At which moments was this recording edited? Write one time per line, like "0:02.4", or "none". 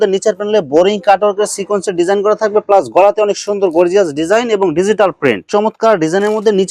0:05.4